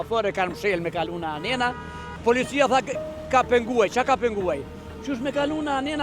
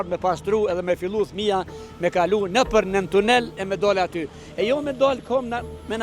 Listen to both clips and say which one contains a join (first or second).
first